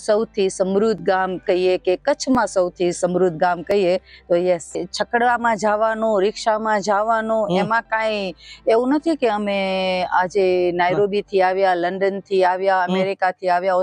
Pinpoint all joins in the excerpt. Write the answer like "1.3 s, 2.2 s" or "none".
4.8 s